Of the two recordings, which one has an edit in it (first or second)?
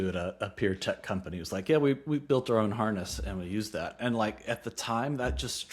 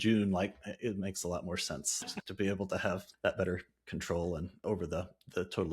second